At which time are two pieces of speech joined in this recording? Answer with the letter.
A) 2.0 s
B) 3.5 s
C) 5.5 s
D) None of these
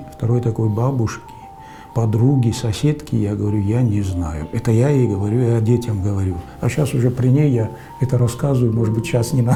D